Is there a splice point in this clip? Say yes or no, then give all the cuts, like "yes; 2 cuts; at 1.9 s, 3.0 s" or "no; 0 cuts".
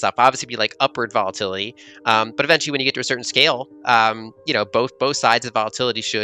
no; 0 cuts